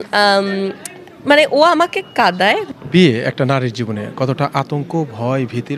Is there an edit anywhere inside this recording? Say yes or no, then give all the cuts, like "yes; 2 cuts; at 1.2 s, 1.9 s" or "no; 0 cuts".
yes; 1 cut; at 2.7 s